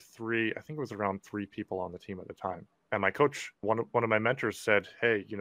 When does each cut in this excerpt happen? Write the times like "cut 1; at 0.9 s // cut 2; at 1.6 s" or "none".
cut 1; at 2.7 s